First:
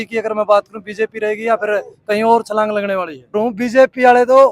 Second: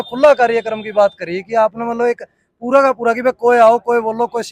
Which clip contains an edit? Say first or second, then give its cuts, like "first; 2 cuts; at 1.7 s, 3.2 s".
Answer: first; 1 cut; at 3.3 s